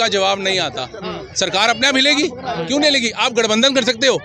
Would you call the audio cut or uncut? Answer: uncut